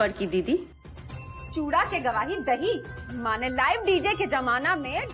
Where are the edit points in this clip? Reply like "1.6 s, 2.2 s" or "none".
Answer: none